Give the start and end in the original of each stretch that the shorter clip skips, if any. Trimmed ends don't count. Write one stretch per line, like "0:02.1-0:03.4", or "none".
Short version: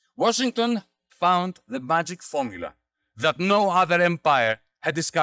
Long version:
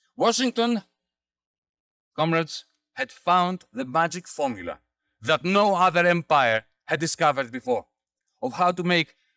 0:01.0-0:03.1